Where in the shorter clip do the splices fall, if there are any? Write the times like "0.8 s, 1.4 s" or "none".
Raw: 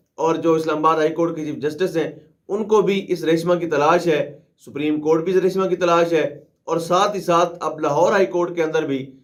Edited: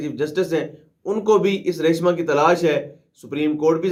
none